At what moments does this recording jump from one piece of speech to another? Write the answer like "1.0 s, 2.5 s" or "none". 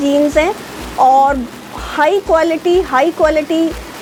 none